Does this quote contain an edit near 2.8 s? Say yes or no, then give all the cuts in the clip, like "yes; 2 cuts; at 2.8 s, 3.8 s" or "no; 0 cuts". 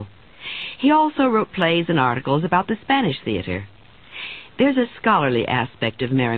no; 1 cut; at 4.5 s